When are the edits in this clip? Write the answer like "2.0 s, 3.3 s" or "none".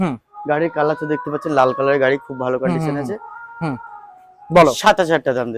none